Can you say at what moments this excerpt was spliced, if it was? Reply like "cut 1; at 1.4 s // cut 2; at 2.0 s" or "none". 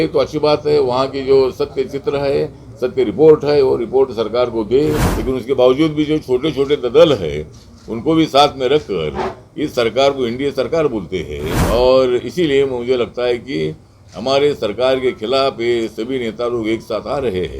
cut 1; at 5.1 s // cut 2; at 11.6 s